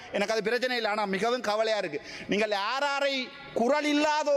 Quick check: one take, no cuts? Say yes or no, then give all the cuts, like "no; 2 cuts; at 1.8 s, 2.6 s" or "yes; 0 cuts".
yes; 0 cuts